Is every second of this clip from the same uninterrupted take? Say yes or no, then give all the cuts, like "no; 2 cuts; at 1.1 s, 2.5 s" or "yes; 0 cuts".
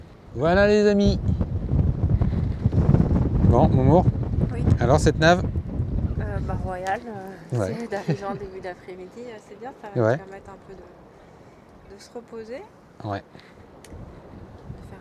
yes; 0 cuts